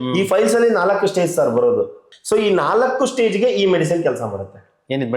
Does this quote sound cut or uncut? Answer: cut